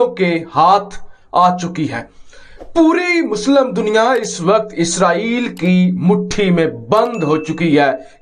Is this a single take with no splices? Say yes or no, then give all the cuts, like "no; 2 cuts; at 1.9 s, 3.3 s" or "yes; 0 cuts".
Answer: yes; 0 cuts